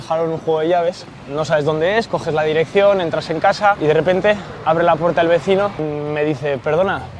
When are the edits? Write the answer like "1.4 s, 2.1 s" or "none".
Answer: 1.0 s, 3.8 s, 5.8 s

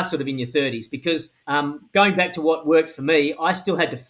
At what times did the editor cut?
1.3 s

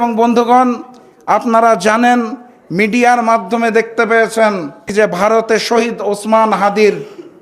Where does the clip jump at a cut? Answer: 4.8 s

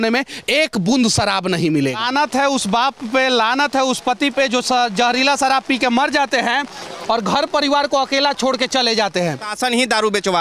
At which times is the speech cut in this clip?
2.0 s, 9.5 s

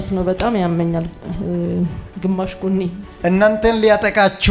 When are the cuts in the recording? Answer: 3.1 s

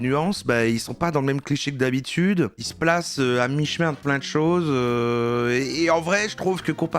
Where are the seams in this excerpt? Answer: 2.5 s

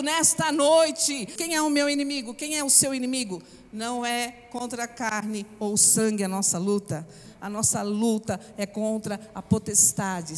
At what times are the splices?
1.4 s, 7.2 s

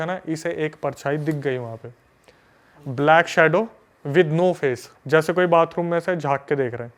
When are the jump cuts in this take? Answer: 4.9 s

